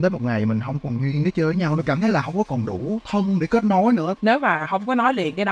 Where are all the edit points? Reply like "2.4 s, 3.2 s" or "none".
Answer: 4.2 s